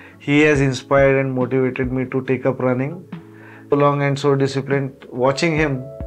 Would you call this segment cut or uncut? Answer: cut